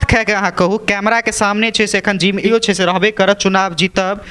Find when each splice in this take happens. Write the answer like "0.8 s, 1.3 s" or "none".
2.5 s